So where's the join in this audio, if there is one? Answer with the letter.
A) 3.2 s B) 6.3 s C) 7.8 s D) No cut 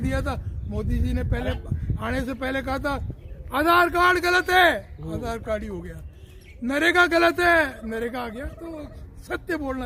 D